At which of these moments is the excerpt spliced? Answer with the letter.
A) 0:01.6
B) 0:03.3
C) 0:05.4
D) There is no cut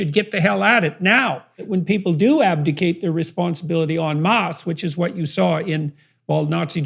A